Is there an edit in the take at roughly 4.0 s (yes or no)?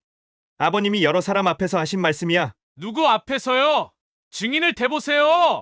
no